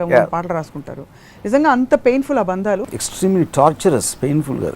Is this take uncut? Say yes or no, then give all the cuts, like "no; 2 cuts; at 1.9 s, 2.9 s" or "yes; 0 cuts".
no; 1 cut; at 2.9 s